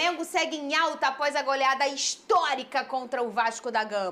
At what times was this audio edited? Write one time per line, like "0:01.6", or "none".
none